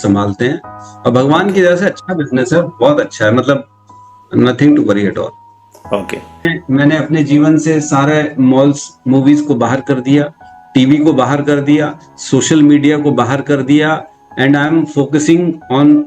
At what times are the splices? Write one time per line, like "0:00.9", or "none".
0:06.5